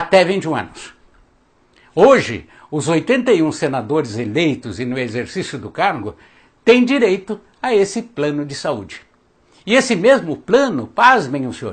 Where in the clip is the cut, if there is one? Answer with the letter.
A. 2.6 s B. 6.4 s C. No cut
A